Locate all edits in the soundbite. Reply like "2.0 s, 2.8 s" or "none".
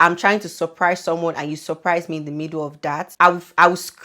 3.1 s